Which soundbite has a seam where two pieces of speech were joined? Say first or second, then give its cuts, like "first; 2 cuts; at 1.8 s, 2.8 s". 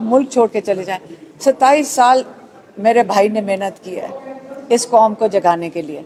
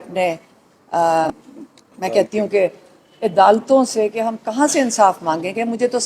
second; 1 cut; at 1.3 s